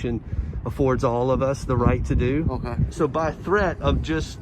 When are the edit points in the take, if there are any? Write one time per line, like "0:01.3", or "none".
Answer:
0:02.8